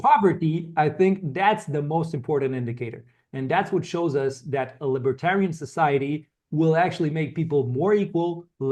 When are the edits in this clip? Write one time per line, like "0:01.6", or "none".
none